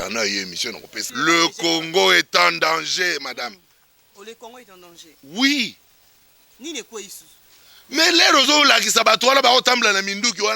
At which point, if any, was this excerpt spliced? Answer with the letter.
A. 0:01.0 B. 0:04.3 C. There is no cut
A